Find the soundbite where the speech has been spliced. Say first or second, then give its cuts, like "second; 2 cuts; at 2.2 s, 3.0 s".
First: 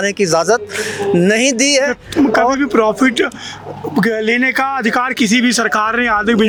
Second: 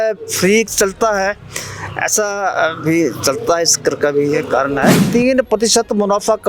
second; 1 cut; at 5.0 s